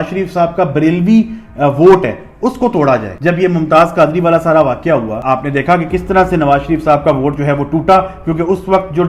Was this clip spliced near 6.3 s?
no; 2 cuts; at 3.1 s, 5.1 s

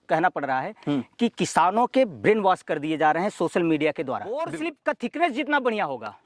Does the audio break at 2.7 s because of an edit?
no; 1 cut; at 4.5 s

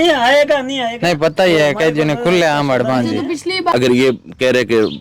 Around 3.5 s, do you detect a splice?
yes; 1 cut; at 3.5 s

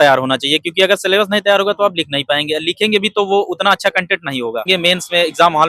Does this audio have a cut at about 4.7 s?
yes; 1 cut; at 4.7 s

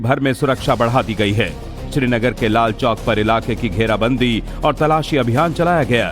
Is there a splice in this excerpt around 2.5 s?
yes; 1 cut; at 2.5 s

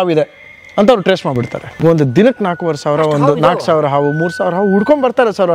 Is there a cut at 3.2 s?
no; 1 cut; at 1.8 s

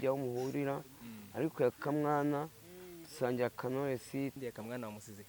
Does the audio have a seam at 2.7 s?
no; 1 cut; at 4.4 s

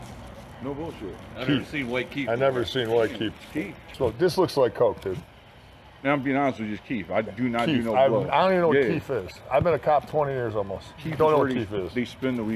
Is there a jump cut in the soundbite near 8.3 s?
no; 1 cut; at 3.9 s

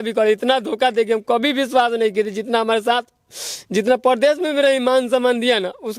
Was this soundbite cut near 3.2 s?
no; 0 cuts

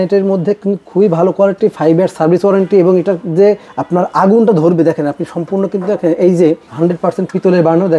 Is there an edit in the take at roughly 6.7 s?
yes; 2 cuts; at 3.7 s, 6.7 s

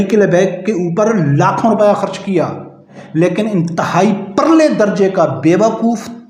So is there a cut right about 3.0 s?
yes; 1 cut; at 3.0 s

